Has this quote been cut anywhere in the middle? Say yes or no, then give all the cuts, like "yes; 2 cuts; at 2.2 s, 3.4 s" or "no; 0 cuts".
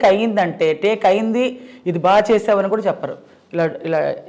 no; 0 cuts